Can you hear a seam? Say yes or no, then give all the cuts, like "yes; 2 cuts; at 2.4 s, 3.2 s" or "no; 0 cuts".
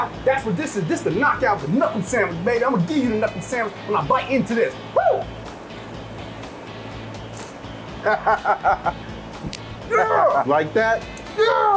no; 0 cuts